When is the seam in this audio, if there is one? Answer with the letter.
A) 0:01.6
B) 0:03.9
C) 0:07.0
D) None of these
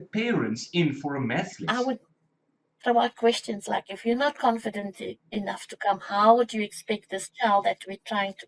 A